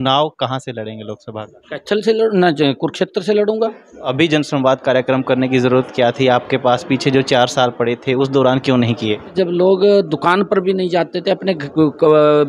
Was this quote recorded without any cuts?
no; 2 cuts; at 4.1 s, 9.3 s

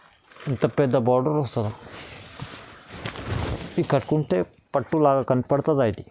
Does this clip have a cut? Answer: no; 0 cuts

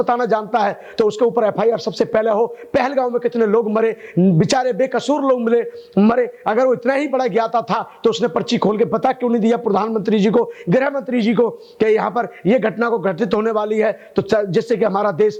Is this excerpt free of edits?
yes; 0 cuts

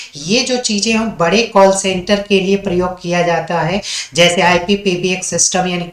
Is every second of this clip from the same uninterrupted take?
yes; 0 cuts

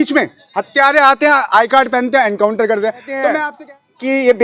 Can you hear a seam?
yes; 1 cut; at 3.4 s

